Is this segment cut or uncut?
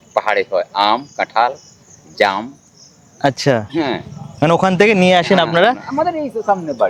uncut